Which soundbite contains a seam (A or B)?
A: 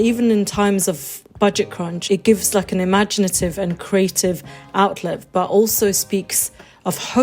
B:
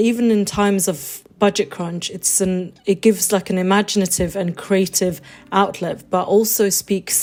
A